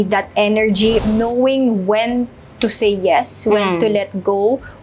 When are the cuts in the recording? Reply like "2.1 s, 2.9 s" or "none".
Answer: 1.0 s